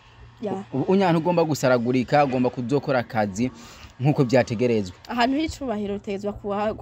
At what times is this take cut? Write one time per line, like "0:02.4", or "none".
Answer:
none